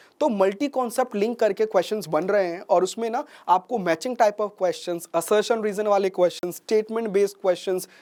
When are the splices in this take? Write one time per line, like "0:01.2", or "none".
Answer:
none